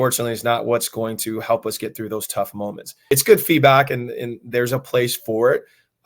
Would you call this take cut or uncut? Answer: cut